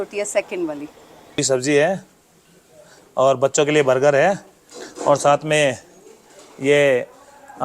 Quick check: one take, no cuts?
no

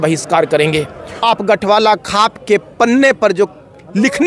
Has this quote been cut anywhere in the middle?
yes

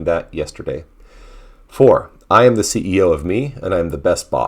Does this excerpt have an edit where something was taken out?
no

